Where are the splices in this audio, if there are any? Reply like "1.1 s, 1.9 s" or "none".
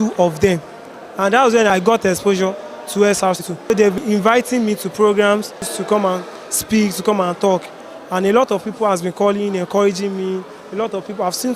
1.7 s, 4.0 s, 5.7 s